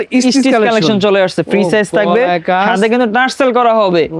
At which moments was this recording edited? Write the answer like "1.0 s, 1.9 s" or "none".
none